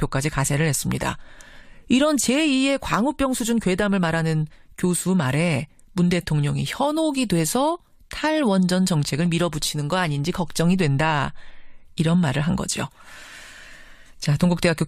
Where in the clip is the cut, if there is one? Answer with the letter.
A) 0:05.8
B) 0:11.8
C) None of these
A